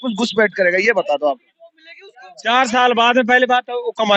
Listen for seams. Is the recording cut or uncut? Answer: uncut